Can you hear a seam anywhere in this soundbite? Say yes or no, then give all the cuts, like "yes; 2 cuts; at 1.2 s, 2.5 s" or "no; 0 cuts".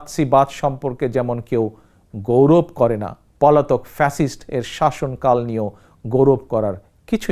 no; 0 cuts